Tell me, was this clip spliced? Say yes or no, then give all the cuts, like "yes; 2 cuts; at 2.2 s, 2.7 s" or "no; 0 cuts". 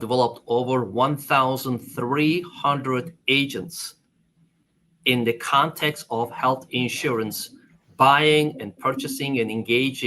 no; 0 cuts